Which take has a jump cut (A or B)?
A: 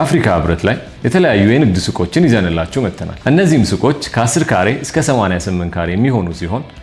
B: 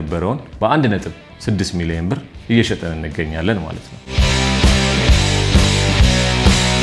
A